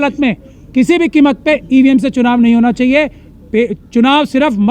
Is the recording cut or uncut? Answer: uncut